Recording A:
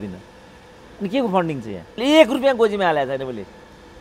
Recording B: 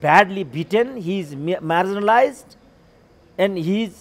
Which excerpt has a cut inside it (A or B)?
A